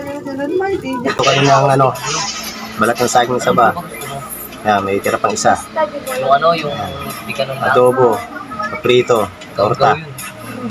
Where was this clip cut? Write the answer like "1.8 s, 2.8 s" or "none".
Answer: 1.1 s